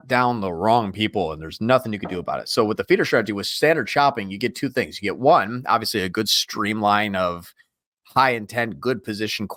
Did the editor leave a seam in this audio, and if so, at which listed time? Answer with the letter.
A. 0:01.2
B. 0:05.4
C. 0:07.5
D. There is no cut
D